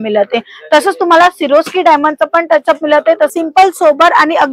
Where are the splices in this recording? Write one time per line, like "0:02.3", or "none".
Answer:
0:03.3